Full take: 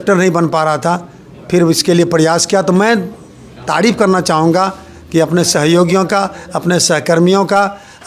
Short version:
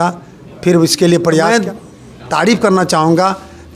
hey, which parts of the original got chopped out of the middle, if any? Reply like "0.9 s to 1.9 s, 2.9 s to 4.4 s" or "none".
2.3 s to 2.8 s